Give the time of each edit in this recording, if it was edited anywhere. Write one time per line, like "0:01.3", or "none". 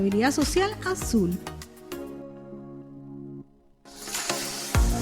0:01.6
0:04.0